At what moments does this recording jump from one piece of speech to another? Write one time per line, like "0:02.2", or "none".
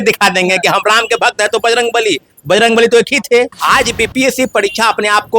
0:03.6